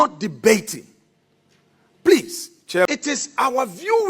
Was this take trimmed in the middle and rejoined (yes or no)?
yes